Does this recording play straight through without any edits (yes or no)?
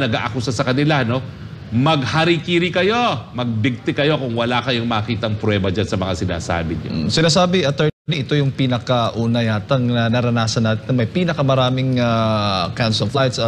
yes